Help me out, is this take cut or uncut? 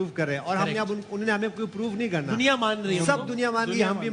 uncut